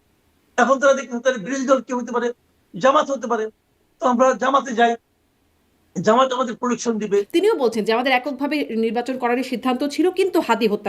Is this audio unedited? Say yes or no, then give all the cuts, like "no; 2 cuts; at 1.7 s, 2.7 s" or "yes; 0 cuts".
no; 1 cut; at 7.3 s